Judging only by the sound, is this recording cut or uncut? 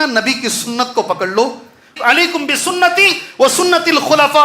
cut